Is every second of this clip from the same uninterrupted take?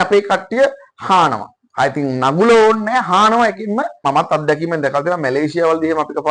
no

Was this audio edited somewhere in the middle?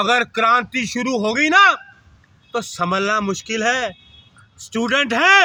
no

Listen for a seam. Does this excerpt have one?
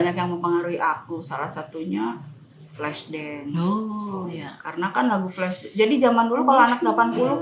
no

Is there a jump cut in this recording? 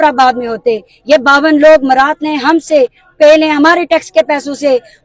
no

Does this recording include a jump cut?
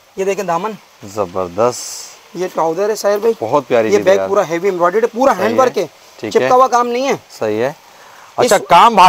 no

